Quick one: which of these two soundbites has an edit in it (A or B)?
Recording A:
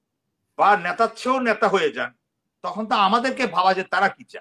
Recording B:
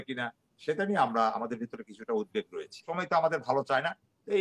B